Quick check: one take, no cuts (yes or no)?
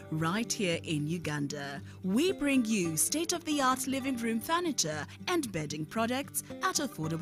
yes